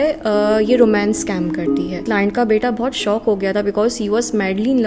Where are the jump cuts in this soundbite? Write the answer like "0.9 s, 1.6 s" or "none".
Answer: 2.0 s